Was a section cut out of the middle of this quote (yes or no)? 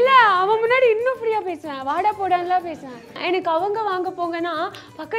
yes